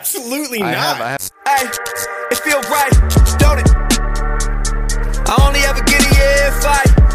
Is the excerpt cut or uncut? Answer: cut